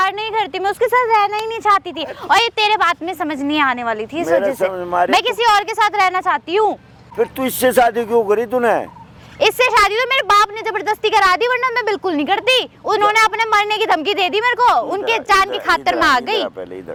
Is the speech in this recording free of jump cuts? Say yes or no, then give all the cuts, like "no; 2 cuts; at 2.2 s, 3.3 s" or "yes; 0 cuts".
yes; 0 cuts